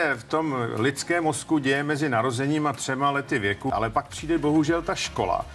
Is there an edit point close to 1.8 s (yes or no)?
no